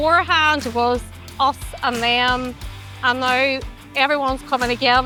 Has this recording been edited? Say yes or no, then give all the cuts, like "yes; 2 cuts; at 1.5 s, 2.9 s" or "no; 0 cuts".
no; 0 cuts